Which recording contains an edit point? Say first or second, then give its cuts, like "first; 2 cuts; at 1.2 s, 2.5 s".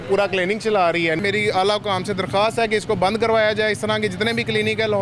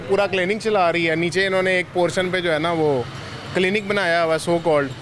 first; 1 cut; at 1.2 s